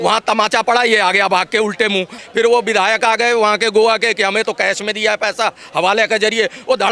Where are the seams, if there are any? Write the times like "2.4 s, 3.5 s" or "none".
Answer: 2.1 s